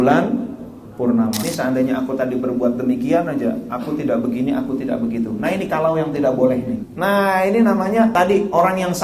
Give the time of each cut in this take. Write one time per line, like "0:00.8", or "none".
0:01.5
0:06.9
0:08.1